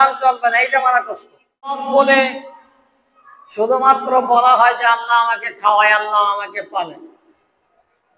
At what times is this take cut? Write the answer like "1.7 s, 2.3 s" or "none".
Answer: 1.8 s